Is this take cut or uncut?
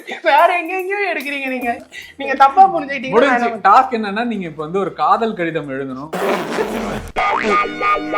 cut